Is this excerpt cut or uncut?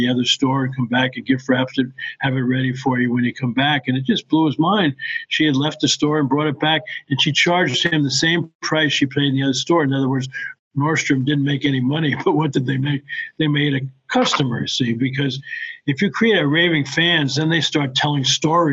uncut